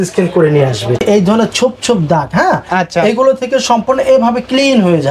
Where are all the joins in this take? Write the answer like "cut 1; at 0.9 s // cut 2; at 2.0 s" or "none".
cut 1; at 1.0 s

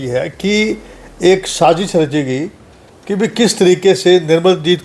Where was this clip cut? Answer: none

